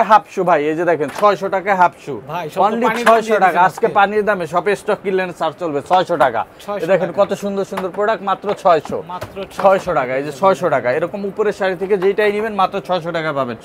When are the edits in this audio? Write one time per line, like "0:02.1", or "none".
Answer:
none